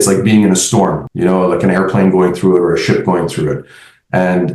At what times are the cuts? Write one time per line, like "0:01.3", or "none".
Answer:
0:01.1